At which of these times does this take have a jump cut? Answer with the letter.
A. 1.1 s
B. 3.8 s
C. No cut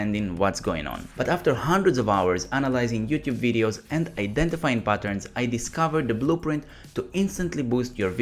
A